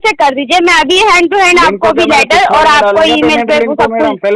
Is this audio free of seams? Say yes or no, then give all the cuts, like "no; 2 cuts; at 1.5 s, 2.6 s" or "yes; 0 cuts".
yes; 0 cuts